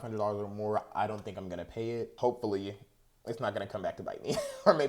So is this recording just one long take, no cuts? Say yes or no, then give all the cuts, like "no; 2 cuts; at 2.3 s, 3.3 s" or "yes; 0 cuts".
no; 1 cut; at 2.1 s